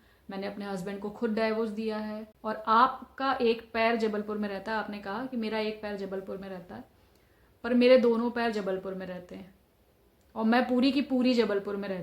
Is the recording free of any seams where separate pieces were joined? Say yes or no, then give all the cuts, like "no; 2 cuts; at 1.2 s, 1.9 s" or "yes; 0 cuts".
no; 1 cut; at 2.3 s